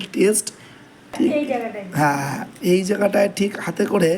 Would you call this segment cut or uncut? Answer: cut